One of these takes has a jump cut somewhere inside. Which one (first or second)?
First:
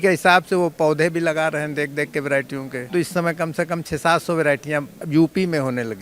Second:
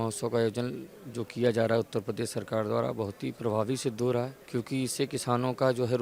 first